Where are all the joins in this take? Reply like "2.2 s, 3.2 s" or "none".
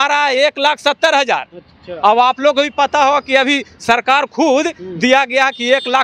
none

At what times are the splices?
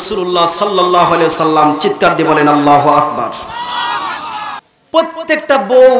4.6 s

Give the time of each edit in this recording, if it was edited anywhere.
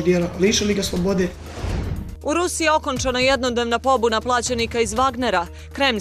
1.4 s

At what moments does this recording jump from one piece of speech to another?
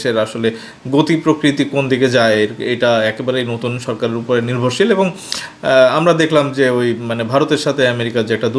none

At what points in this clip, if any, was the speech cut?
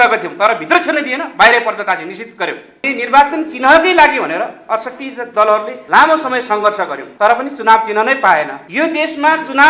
2.9 s, 5.8 s, 7.0 s, 8.6 s

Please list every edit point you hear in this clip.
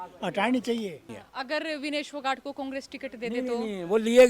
1.2 s

